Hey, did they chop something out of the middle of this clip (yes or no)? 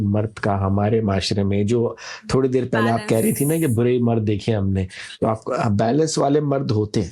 no